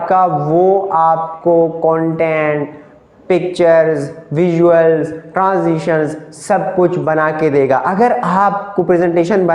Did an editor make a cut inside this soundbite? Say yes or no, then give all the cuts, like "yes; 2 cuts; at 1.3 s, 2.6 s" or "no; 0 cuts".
no; 0 cuts